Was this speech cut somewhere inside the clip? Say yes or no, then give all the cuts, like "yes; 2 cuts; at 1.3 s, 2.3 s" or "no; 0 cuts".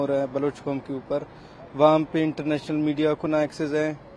no; 0 cuts